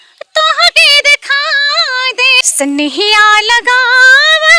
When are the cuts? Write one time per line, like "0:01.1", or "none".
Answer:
0:02.5